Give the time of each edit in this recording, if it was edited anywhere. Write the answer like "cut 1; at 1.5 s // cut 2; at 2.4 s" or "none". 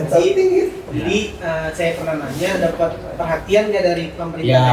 none